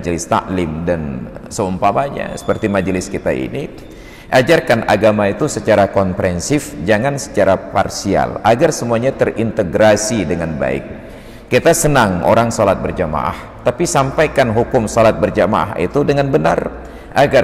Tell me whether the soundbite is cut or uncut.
uncut